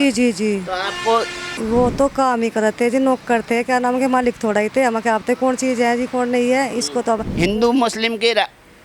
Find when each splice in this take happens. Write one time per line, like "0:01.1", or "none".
0:01.5
0:07.3